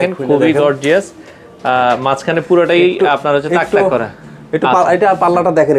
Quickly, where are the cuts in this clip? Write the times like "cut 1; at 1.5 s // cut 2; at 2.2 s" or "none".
none